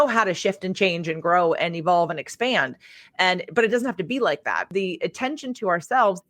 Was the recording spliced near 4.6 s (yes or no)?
yes